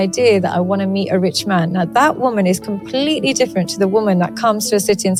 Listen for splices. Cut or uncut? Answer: uncut